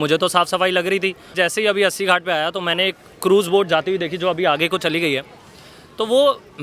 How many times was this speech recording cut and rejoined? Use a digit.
1